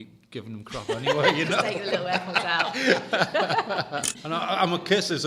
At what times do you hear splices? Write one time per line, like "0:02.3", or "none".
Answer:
0:04.1